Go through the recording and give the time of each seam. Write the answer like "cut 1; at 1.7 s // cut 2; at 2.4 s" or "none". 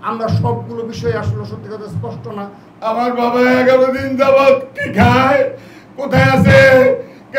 cut 1; at 2.6 s